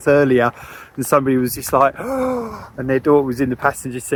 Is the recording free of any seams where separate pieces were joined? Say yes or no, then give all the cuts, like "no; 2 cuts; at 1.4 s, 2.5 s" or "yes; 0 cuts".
yes; 0 cuts